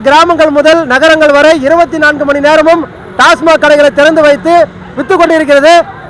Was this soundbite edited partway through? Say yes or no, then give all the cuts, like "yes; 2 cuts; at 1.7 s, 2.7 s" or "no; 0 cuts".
no; 0 cuts